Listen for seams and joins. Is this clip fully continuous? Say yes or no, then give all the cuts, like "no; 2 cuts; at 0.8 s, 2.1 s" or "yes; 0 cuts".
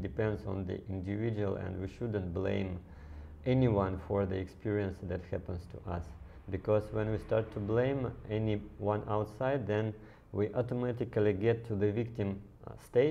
yes; 0 cuts